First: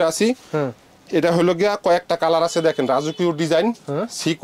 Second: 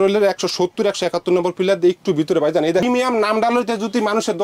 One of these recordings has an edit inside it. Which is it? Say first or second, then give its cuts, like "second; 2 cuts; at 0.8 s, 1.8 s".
second; 1 cut; at 2.8 s